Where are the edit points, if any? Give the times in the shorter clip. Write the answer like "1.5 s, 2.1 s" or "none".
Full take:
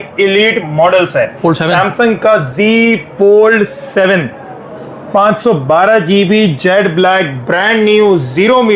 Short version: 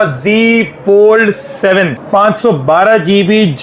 2.0 s